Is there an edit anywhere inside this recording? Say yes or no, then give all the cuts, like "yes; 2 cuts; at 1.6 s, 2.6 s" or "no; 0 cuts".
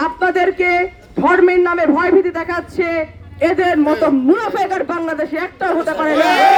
no; 0 cuts